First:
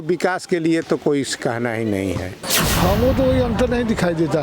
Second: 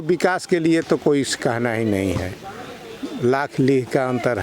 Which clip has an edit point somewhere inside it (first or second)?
first